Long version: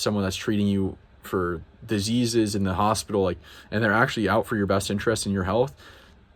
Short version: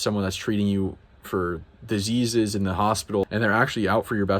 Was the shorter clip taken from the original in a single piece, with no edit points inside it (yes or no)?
no